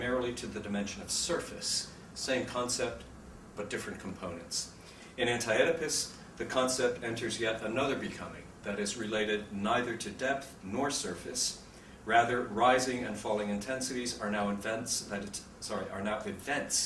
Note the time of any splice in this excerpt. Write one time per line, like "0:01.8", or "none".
0:02.9